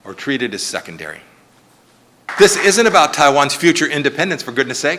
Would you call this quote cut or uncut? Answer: cut